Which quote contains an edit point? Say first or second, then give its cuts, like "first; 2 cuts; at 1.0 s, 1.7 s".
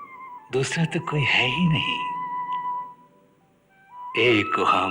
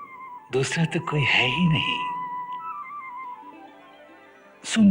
second; 1 cut; at 2.6 s